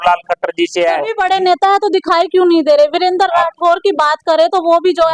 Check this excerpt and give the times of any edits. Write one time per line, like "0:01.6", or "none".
0:01.1